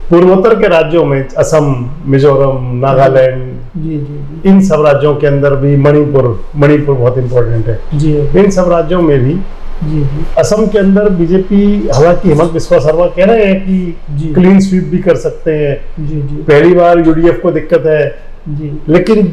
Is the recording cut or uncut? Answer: uncut